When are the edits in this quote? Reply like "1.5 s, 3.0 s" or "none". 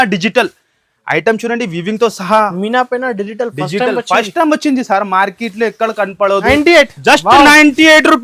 6.4 s